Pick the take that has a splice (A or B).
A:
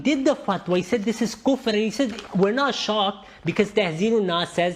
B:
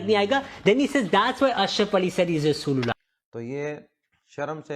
B